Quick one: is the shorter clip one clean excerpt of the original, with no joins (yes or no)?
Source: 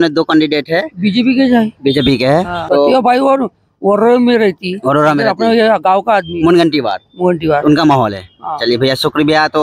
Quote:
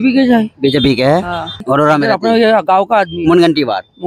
no